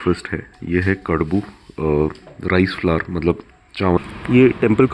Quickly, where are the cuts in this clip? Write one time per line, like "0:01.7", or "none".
0:04.0